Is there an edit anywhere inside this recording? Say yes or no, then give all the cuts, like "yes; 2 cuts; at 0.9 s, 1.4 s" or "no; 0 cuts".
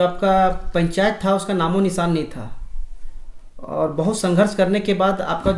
no; 0 cuts